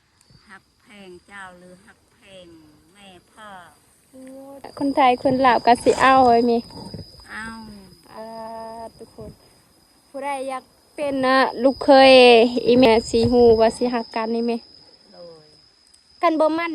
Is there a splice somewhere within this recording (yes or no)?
yes